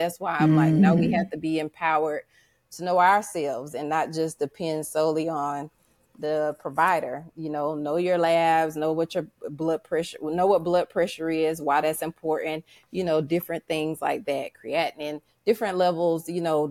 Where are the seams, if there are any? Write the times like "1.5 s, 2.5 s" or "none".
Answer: none